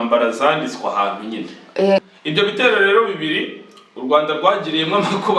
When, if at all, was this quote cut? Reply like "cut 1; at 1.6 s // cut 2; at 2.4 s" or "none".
cut 1; at 1.9 s